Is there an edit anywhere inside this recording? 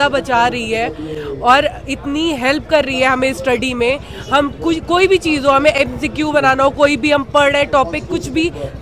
no; 0 cuts

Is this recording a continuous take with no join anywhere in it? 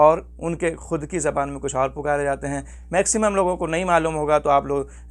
no; 1 cut; at 2.7 s

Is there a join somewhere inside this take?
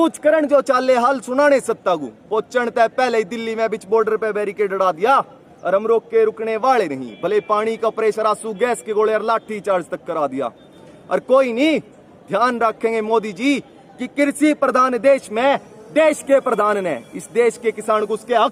no; 0 cuts

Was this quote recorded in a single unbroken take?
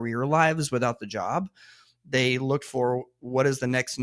yes; 0 cuts

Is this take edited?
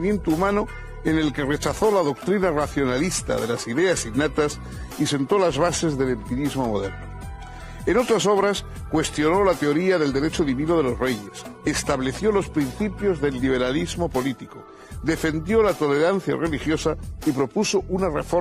yes; 1 cut; at 17.4 s

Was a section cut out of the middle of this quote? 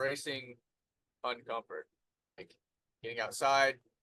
no; 0 cuts

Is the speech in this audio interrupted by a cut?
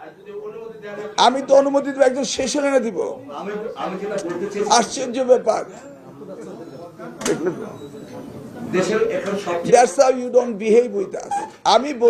no; 0 cuts

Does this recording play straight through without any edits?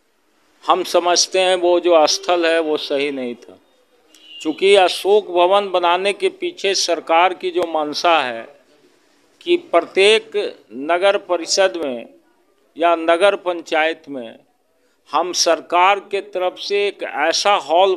yes; 0 cuts

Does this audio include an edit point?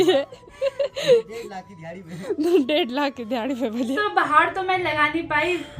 yes; 1 cut; at 4.0 s

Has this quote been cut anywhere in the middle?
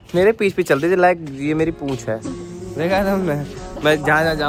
no; 0 cuts

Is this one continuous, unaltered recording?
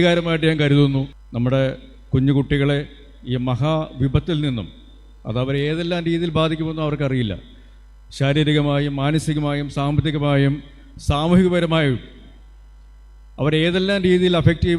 no; 1 cut; at 1.2 s

